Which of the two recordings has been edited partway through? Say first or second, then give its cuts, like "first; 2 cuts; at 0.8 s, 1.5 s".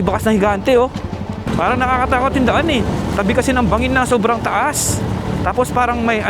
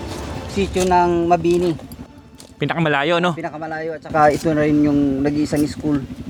first; 1 cut; at 1.4 s